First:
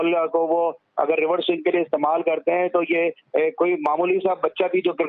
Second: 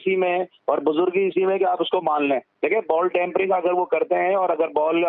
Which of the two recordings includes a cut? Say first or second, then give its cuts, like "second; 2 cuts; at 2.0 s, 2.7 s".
second; 1 cut; at 2.5 s